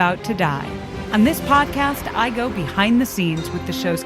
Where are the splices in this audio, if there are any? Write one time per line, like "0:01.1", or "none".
0:01.0